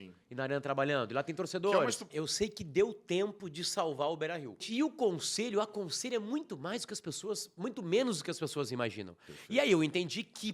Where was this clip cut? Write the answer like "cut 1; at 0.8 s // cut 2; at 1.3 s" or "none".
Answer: cut 1; at 2.1 s // cut 2; at 4.7 s